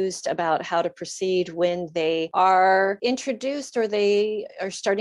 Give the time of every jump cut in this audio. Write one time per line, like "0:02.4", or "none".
0:02.3
0:03.0